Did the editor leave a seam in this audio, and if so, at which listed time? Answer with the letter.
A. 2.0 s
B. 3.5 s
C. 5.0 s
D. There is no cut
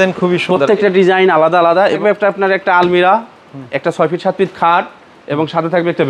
A